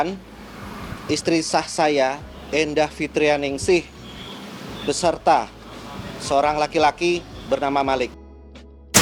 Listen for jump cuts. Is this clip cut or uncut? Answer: uncut